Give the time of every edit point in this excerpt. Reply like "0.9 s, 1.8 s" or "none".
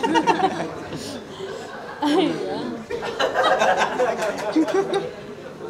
none